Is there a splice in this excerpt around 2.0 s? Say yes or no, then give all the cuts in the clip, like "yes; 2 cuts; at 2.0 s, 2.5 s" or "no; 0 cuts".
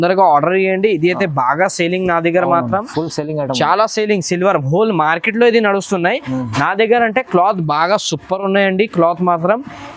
no; 0 cuts